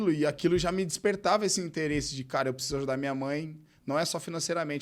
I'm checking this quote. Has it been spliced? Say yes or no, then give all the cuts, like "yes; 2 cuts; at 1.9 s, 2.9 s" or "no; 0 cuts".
no; 0 cuts